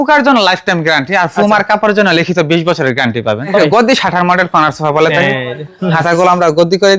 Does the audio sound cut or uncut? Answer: cut